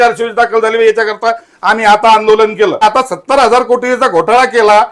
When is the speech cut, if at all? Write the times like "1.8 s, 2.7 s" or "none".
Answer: 2.8 s